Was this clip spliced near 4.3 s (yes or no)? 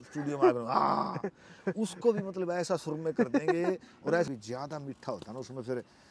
yes